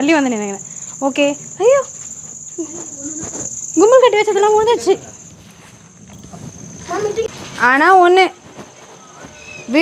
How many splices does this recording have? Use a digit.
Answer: 1